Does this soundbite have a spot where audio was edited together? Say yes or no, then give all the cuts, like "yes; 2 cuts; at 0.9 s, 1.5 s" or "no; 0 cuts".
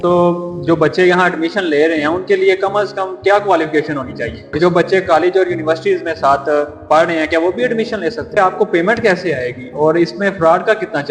yes; 2 cuts; at 4.6 s, 8.3 s